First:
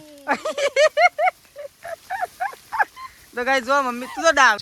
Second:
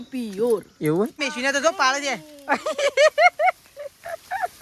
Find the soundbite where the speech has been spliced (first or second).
second